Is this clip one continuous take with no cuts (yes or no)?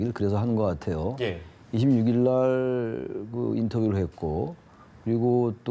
no